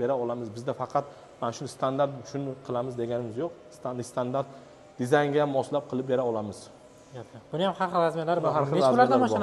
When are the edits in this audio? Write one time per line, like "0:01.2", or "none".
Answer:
none